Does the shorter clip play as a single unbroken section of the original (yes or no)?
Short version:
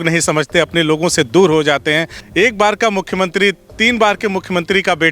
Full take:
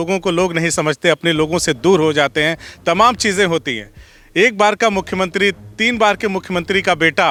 no